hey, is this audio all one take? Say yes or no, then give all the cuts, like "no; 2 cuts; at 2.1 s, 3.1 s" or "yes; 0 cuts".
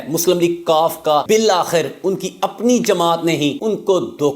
no; 1 cut; at 1.2 s